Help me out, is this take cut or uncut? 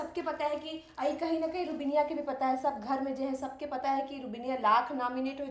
uncut